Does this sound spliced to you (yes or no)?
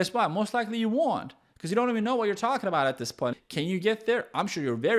yes